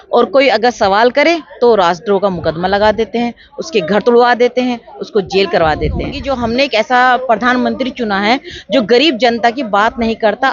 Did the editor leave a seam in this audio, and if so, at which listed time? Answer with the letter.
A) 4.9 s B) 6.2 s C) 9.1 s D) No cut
B